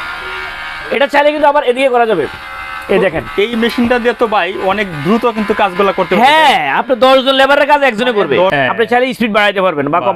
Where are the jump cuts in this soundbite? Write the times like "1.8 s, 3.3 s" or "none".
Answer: 8.5 s